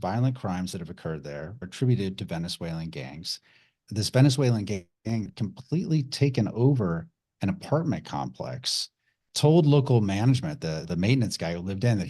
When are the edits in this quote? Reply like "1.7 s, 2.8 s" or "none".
1.7 s, 3.8 s